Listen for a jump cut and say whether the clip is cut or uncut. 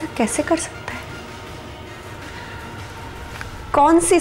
uncut